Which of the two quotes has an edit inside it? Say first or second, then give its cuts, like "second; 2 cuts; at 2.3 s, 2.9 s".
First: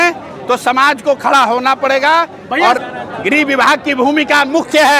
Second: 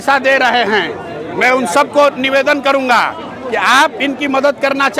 first; 1 cut; at 2.8 s